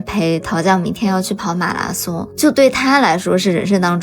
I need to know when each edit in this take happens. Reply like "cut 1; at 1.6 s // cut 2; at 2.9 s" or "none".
cut 1; at 2.3 s